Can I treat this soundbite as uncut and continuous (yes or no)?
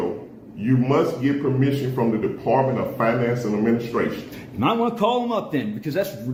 yes